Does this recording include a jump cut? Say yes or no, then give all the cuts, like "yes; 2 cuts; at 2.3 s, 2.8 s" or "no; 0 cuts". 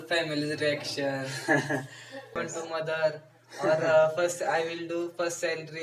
yes; 1 cut; at 2.3 s